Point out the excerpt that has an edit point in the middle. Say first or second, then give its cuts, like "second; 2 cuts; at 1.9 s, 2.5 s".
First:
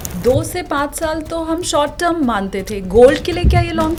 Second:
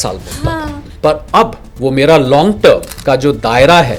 second; 2 cuts; at 1.6 s, 2.9 s